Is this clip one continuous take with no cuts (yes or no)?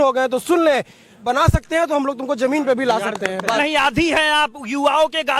no